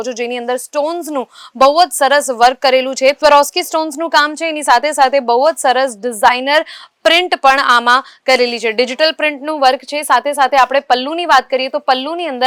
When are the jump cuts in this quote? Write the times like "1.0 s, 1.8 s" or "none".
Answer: none